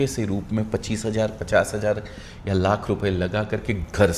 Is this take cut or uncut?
uncut